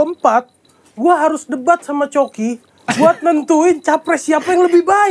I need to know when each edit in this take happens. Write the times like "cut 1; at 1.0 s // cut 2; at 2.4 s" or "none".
none